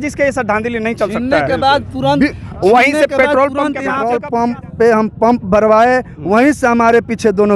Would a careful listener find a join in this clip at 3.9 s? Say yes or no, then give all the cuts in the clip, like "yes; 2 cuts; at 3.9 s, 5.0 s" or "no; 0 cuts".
yes; 1 cut; at 3.9 s